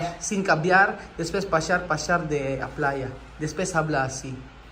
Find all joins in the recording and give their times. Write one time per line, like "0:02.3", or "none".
none